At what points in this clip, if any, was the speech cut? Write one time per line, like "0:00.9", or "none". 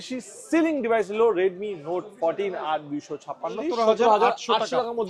0:03.6

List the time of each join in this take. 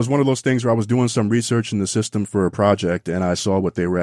none

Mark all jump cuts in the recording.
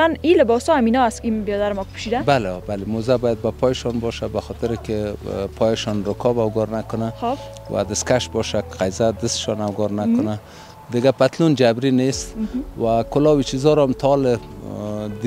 none

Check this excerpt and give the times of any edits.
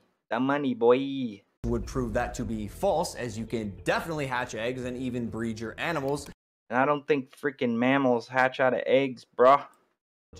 none

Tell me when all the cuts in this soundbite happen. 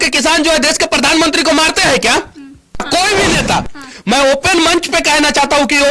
0:02.8

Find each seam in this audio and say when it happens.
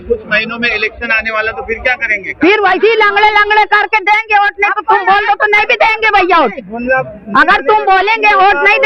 none

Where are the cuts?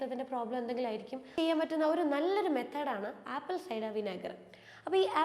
0:01.2

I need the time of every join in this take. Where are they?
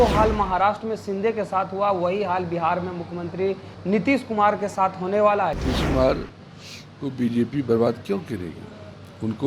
0:05.6

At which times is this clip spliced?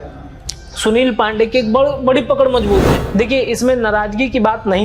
0:03.0

